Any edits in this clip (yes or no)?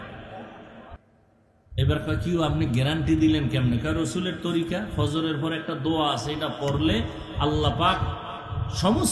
yes